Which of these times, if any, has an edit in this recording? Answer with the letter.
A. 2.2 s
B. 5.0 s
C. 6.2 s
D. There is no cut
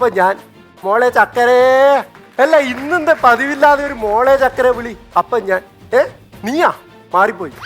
A